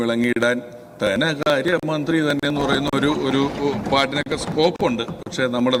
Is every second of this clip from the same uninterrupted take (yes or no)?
yes